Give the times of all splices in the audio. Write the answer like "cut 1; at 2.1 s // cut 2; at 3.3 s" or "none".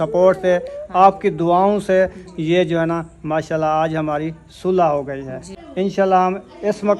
cut 1; at 5.6 s